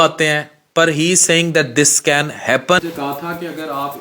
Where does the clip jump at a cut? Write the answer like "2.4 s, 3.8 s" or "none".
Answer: 2.8 s